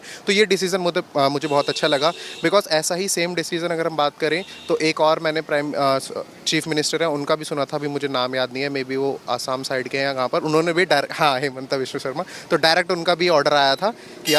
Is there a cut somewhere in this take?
no; 0 cuts

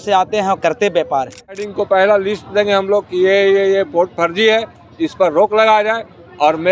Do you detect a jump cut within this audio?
yes; 1 cut; at 1.7 s

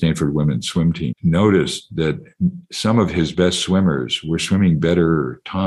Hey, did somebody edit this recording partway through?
yes; 1 cut; at 1.1 s

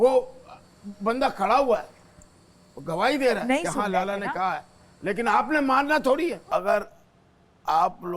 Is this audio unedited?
no; 1 cut; at 6.4 s

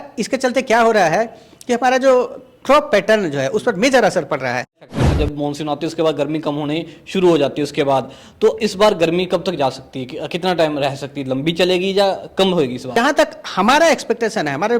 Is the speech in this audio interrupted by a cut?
yes; 2 cuts; at 4.9 s, 12.9 s

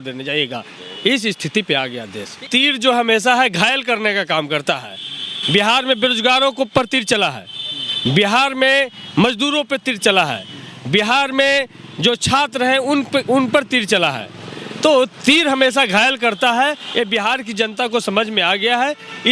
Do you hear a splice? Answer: yes; 1 cut; at 2.4 s

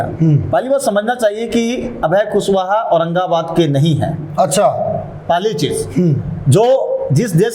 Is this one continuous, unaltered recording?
yes; 0 cuts

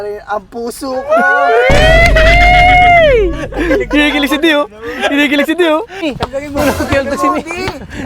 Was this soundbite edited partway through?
yes; 1 cut; at 6.0 s

